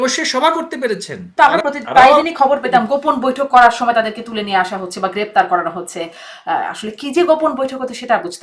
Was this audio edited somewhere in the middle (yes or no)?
yes